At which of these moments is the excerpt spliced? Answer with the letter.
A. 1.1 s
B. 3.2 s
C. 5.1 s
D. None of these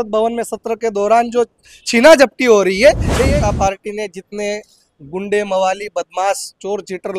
B